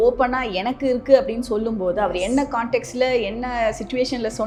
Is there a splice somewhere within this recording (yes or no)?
no